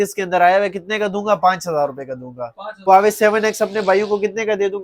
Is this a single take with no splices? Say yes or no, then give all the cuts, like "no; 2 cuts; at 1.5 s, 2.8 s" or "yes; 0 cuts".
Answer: no; 1 cut; at 2.9 s